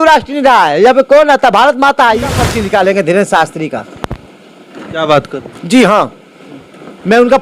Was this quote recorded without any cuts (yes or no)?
no